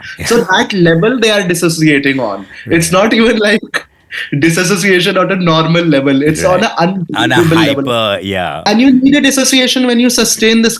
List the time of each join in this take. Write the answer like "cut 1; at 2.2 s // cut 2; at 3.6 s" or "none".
cut 1; at 8.5 s